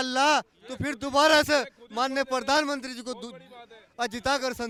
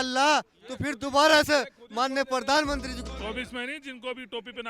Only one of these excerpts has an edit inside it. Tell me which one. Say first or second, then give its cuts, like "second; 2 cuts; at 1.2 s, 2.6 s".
second; 1 cut; at 3.0 s